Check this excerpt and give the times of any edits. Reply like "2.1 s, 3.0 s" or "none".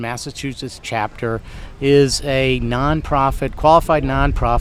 none